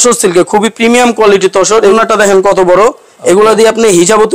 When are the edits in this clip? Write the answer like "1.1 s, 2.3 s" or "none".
1.9 s